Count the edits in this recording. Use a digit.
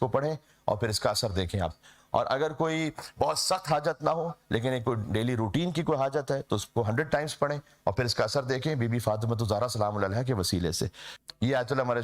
1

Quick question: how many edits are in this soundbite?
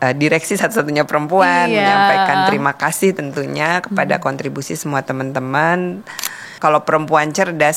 1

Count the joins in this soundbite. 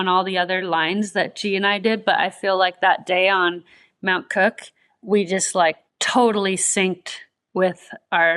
1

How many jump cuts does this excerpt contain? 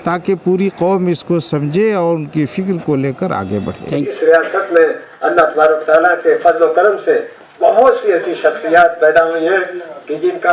0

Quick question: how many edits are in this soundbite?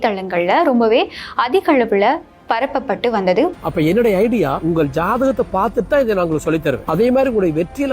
1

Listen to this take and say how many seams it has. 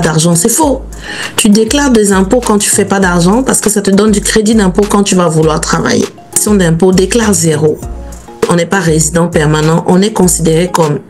2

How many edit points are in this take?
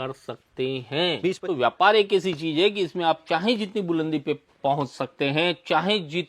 1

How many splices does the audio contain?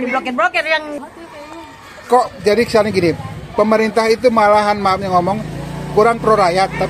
1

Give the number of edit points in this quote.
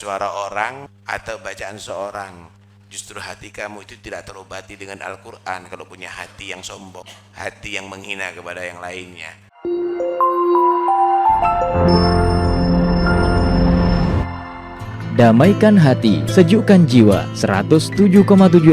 3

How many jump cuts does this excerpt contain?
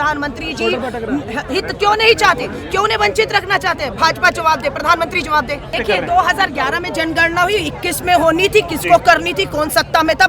1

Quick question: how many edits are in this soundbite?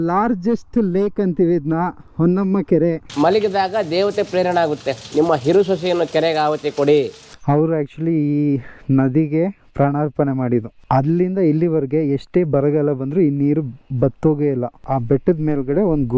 3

